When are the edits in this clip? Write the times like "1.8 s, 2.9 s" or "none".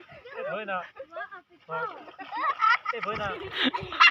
none